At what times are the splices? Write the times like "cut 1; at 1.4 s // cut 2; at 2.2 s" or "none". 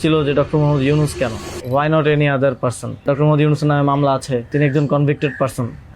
cut 1; at 1.5 s // cut 2; at 3.0 s // cut 3; at 4.5 s